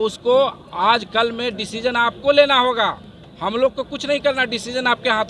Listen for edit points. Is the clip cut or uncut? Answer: uncut